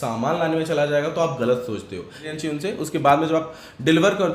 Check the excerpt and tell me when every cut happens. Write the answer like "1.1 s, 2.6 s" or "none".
2.3 s